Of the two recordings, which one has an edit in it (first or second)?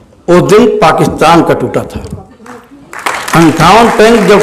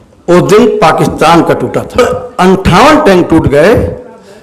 second